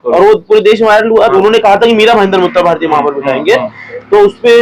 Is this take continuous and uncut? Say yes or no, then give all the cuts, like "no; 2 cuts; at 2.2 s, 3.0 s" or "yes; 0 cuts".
no; 1 cut; at 1.3 s